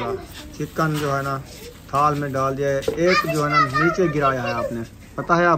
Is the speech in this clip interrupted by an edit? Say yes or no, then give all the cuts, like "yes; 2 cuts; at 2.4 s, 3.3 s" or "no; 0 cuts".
no; 0 cuts